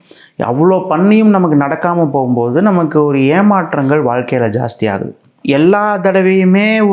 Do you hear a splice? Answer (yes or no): yes